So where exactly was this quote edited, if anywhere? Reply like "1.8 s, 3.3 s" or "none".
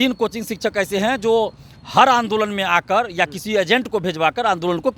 none